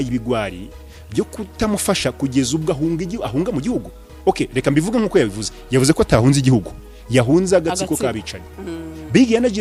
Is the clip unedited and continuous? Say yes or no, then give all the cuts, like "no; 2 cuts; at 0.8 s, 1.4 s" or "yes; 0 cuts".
yes; 0 cuts